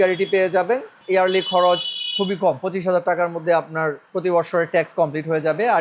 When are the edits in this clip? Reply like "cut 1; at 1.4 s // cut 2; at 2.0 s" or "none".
cut 1; at 1.0 s // cut 2; at 4.0 s